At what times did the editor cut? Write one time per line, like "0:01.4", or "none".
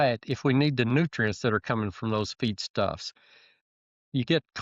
0:03.6